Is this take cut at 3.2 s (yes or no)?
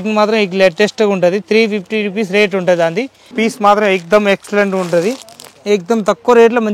yes